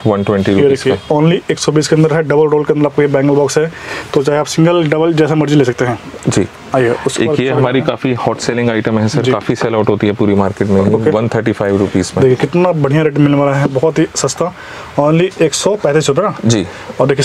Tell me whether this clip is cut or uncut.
uncut